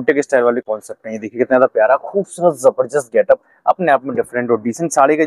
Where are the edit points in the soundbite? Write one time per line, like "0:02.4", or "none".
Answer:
none